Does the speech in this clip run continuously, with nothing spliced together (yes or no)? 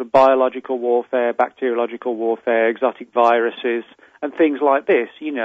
yes